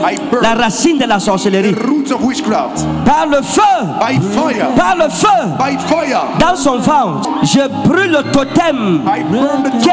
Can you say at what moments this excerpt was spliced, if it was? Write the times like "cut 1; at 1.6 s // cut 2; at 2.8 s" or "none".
cut 1; at 7.3 s